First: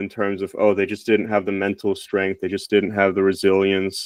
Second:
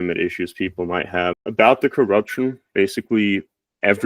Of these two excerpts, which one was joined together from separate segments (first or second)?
second